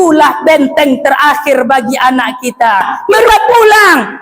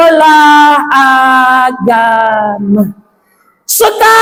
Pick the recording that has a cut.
first; 1 cut; at 3.3 s

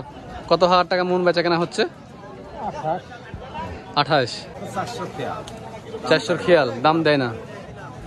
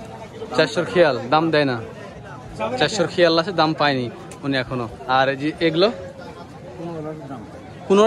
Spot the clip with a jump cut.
first; 1 cut; at 4.6 s

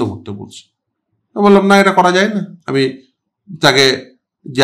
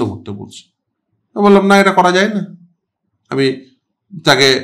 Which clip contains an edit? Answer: first; 1 cut; at 2.6 s

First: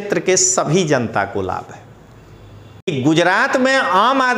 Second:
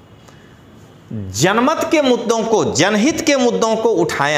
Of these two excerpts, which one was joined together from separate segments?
first; 1 cut; at 2.9 s

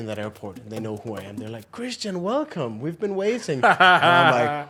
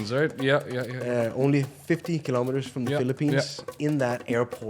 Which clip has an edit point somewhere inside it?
second; 1 cut; at 3.7 s

